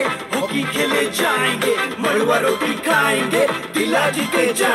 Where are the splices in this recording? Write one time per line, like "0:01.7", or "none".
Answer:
none